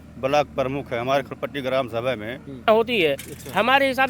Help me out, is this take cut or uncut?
cut